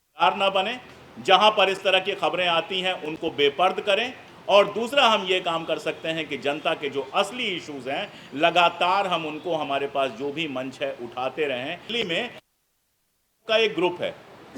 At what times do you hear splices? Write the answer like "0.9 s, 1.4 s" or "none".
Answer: 11.8 s